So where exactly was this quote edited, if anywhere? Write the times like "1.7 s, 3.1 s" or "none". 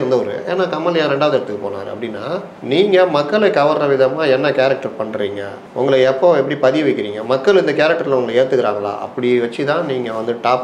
none